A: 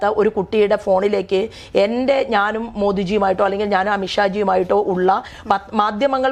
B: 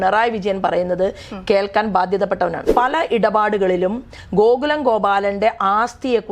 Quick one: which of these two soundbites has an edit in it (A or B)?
B